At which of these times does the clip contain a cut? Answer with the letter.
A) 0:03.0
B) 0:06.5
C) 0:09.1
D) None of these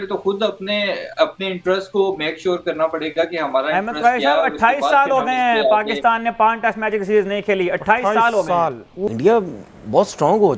C